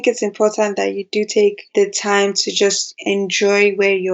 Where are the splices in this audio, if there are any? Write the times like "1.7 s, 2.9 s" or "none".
1.6 s